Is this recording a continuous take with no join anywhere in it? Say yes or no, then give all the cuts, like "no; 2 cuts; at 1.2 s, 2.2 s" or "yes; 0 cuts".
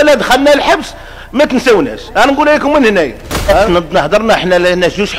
no; 1 cut; at 3.7 s